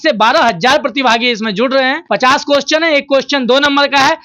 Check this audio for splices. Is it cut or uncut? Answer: cut